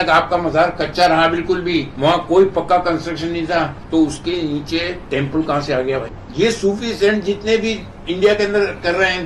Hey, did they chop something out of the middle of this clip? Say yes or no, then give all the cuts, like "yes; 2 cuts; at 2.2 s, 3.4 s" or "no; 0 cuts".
yes; 4 cuts; at 1.9 s, 3.8 s, 5.0 s, 6.2 s